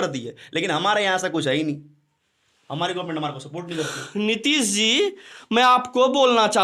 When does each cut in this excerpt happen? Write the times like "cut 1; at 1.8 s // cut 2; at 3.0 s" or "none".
none